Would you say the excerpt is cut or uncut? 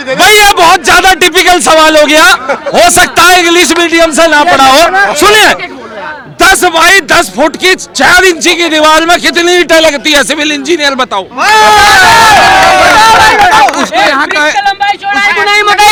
uncut